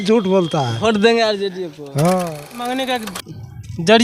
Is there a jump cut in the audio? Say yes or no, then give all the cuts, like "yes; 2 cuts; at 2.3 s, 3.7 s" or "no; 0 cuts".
yes; 1 cut; at 2.5 s